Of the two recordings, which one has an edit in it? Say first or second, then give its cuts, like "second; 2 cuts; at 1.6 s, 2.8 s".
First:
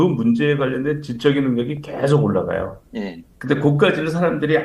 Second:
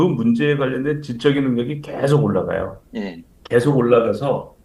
first; 1 cut; at 3.3 s